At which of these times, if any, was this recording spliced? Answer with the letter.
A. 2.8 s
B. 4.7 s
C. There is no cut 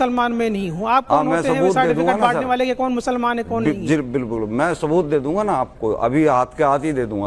C